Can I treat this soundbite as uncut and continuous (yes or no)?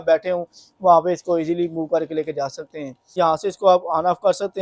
no